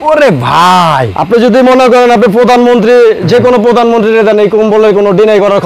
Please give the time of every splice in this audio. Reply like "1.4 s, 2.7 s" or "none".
none